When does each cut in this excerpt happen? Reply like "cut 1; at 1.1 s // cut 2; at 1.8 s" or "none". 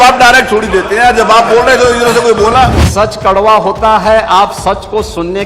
cut 1; at 2.8 s